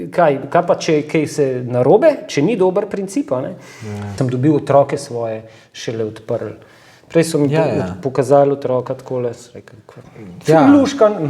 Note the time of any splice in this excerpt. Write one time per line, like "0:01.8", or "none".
0:04.1